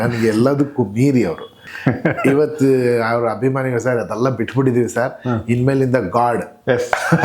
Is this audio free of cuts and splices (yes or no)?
no